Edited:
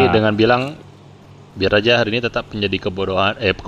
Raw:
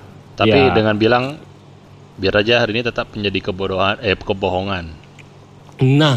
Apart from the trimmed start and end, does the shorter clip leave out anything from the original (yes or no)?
no